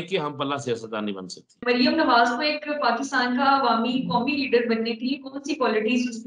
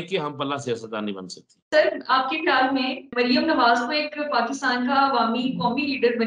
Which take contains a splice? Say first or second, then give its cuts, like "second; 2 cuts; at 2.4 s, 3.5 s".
first; 1 cut; at 1.5 s